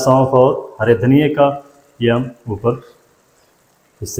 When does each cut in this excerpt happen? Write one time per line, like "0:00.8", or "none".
none